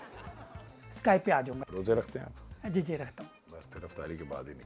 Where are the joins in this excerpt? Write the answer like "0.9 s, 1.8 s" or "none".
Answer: 1.6 s, 3.5 s